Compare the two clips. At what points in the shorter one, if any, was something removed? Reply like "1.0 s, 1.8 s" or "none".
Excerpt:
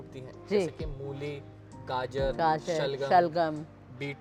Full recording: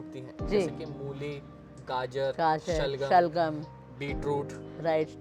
none